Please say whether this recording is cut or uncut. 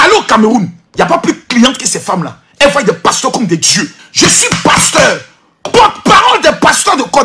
cut